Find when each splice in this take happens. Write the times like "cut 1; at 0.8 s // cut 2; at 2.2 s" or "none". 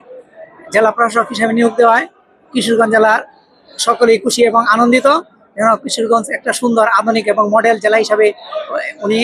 none